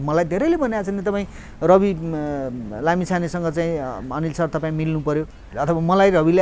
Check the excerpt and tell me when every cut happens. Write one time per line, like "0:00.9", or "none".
0:05.4